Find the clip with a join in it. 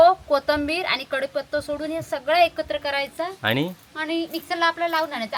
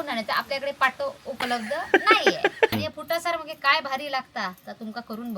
second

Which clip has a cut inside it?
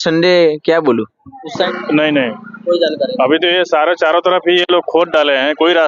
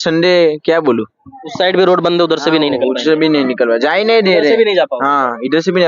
first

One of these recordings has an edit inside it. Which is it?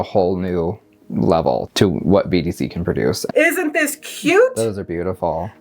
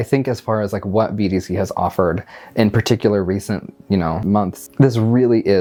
first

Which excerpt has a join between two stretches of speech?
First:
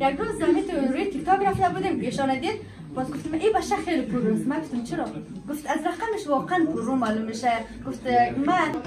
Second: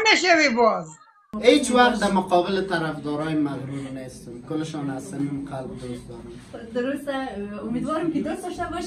second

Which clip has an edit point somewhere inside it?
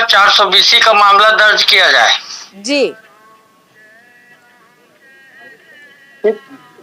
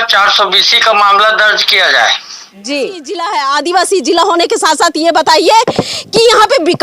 second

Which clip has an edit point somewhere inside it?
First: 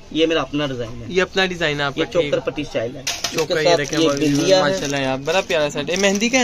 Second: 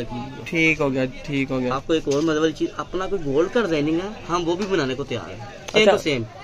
second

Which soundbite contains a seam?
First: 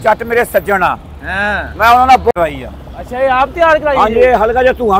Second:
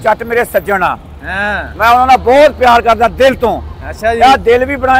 first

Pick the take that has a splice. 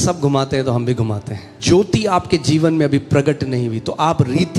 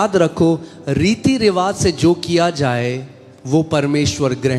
first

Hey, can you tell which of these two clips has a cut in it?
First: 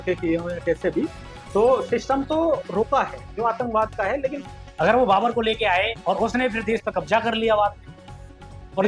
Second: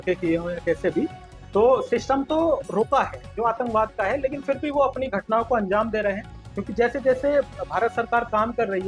first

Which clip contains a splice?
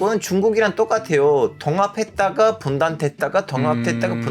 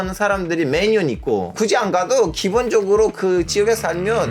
second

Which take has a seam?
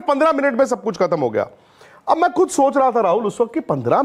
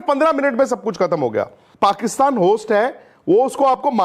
second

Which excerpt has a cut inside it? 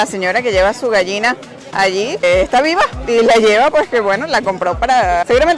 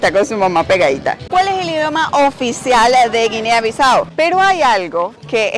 second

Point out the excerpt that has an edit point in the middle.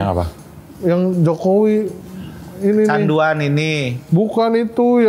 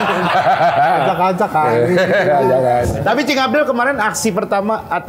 second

